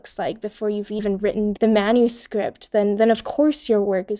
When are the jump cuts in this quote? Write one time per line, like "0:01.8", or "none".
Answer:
0:01.4